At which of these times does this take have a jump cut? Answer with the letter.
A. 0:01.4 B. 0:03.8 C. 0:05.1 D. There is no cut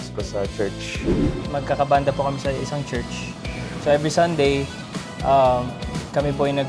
A